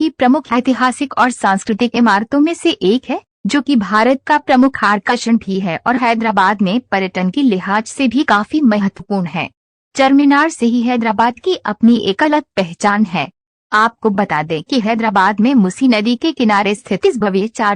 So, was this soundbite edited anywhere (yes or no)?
yes